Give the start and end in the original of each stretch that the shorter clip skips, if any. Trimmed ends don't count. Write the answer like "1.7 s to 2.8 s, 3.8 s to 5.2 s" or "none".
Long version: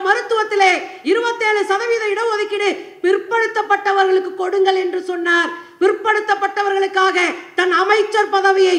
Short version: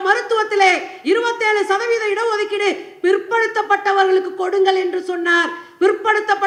none